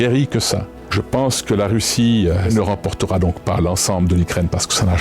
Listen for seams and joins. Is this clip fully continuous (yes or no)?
no